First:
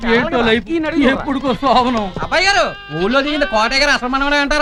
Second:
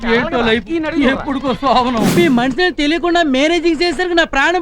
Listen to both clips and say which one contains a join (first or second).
second